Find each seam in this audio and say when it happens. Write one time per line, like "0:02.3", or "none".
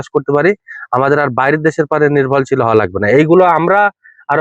none